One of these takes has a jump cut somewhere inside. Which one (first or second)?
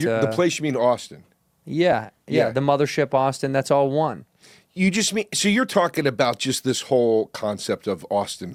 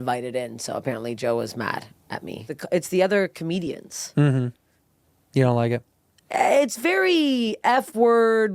second